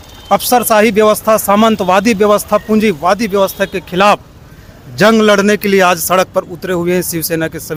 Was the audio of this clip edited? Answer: no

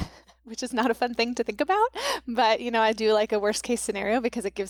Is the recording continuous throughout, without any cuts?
yes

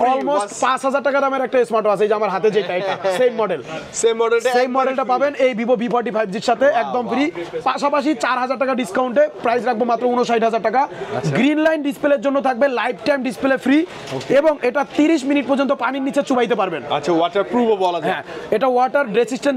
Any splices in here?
no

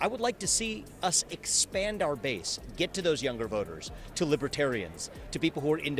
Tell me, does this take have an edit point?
no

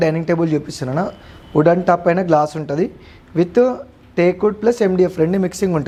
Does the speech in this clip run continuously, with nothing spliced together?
yes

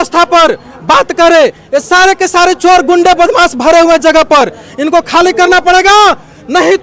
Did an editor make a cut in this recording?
no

